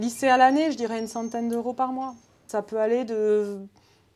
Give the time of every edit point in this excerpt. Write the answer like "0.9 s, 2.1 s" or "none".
2.4 s